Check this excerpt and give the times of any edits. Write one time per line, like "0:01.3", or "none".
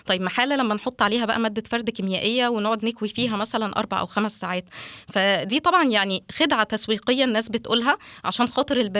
none